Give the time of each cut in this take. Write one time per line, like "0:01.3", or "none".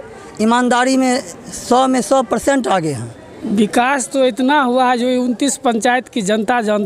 0:03.3